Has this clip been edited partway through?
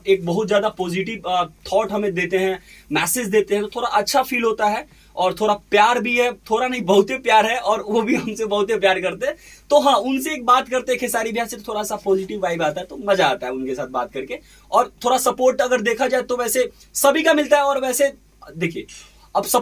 no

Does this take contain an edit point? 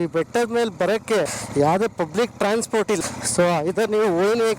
yes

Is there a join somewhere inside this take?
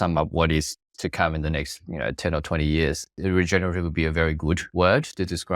yes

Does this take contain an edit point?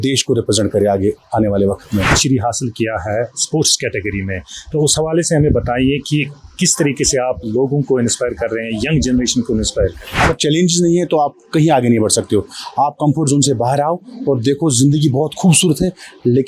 yes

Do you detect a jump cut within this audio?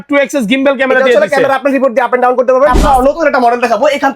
yes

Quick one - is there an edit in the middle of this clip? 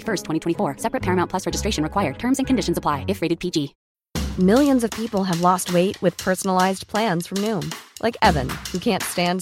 yes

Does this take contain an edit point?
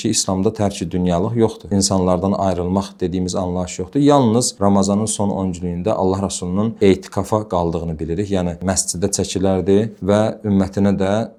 no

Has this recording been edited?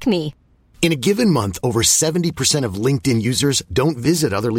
no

